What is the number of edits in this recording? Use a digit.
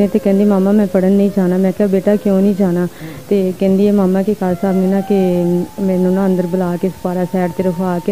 0